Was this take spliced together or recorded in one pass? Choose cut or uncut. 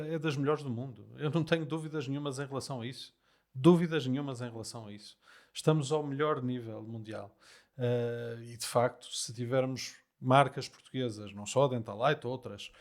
uncut